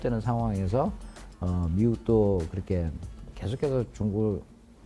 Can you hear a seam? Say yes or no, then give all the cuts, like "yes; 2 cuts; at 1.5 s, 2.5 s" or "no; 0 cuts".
no; 0 cuts